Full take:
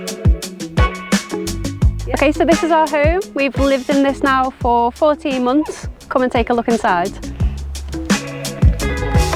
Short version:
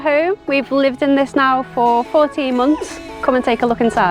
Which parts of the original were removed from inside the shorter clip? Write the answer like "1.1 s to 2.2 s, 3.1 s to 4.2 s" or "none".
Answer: none